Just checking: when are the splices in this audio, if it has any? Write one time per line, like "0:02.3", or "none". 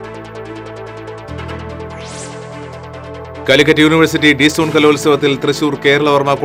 0:03.2

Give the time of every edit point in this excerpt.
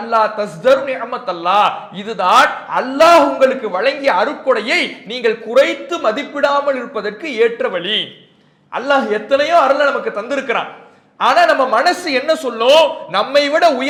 none

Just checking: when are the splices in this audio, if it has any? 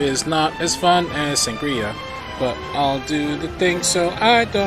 none

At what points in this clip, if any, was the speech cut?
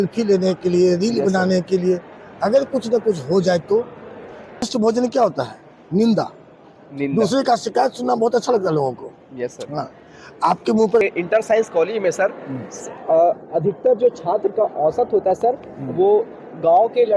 0:04.7
0:11.0

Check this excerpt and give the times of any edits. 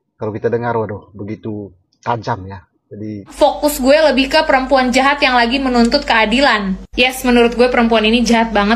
0:03.3

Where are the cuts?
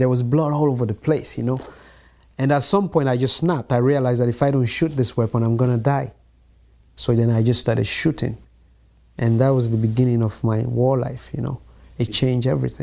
none

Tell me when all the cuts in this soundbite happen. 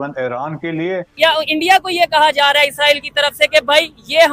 0:01.1

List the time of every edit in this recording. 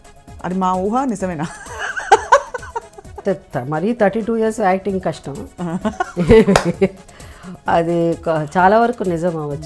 0:03.2

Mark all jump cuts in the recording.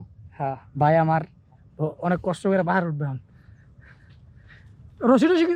none

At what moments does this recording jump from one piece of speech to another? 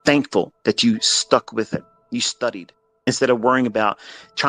0:02.0
0:03.1

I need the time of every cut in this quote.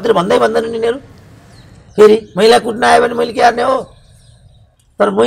none

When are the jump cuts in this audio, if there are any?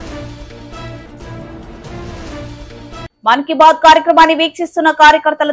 0:03.1

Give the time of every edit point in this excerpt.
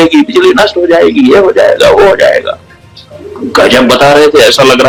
none

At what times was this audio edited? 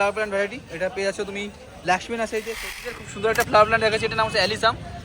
0:02.9

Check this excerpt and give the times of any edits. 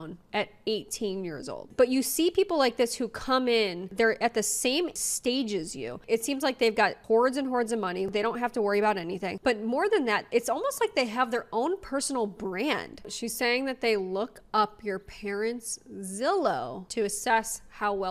0:01.6
0:13.0
0:16.8

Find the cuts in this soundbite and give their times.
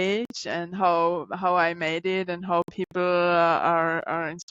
none

